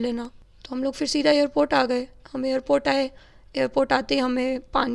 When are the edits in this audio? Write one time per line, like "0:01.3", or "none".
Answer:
none